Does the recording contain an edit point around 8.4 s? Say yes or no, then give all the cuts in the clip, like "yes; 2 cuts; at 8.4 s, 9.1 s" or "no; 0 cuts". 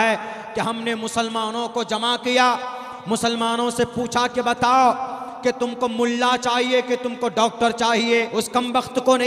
yes; 1 cut; at 8.4 s